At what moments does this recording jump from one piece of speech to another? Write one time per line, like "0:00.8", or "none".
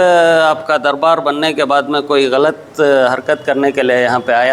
none

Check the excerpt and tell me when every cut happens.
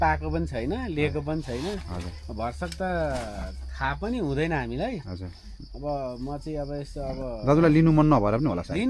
none

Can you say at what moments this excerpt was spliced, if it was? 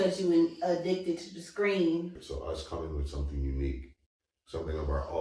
0:02.3

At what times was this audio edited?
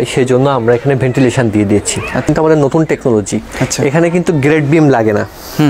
0:02.2

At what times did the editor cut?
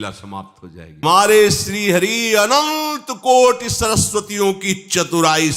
0:01.0

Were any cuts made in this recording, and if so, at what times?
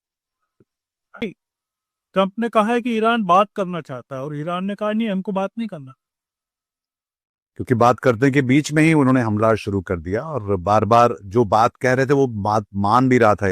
0:01.2

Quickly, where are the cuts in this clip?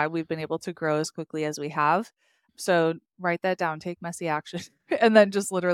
none

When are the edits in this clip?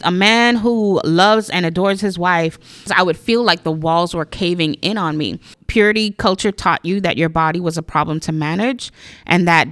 0:02.9
0:05.5

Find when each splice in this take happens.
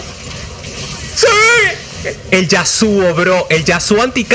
0:02.1

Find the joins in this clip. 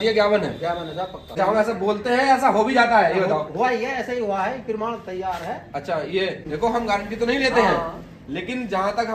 0:01.2
0:06.4

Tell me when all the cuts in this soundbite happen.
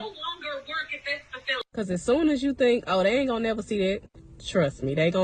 0:01.6

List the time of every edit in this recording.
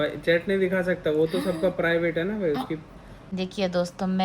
0:03.2

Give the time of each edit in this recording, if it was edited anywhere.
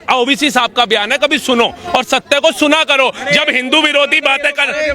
none

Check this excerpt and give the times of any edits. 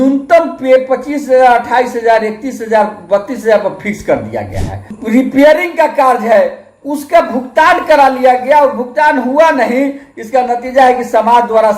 0:04.8

